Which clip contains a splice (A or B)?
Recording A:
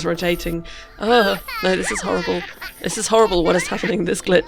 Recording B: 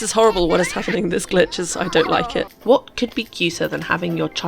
B